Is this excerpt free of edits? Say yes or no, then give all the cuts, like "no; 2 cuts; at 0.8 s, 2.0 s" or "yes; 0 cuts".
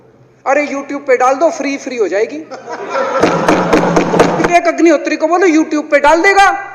no; 1 cut; at 4.5 s